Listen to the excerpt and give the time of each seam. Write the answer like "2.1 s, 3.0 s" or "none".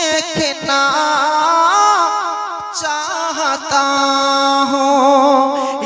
none